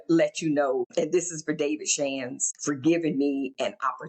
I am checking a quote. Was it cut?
yes; 2 cuts; at 0.9 s, 2.4 s

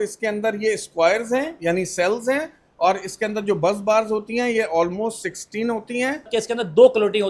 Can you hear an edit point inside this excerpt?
yes; 1 cut; at 6.3 s

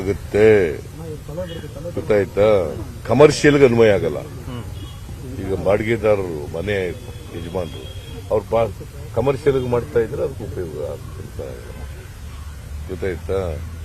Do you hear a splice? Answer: no; 0 cuts

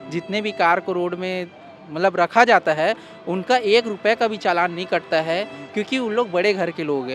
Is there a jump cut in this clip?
no; 0 cuts

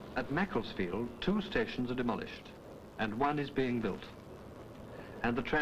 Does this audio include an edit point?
no; 0 cuts

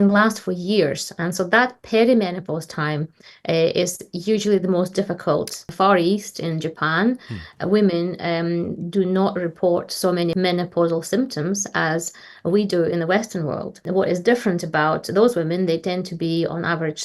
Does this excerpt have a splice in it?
yes; 3 cuts; at 5.7 s, 10.3 s, 13.8 s

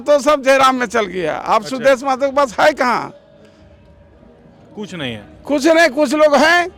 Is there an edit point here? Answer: no; 0 cuts

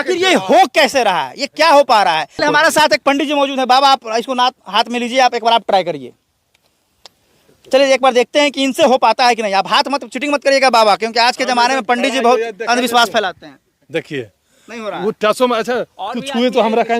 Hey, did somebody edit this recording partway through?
yes; 1 cut; at 2.3 s

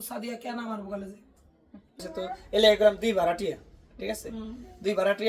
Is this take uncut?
no; 1 cut; at 2.0 s

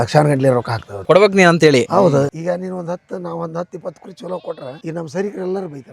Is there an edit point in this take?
yes; 1 cut; at 2.3 s

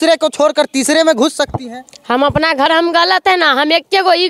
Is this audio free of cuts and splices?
no; 1 cut; at 2.7 s

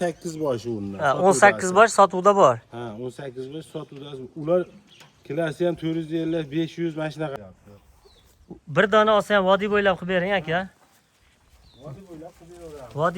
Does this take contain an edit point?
yes; 1 cut; at 7.3 s

